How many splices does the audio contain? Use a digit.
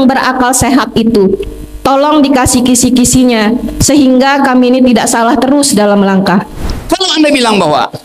1